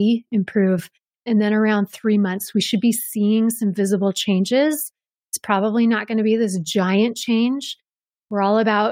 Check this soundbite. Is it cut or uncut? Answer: uncut